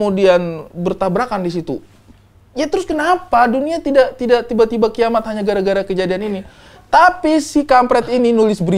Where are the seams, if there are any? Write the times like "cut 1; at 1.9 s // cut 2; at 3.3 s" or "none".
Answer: none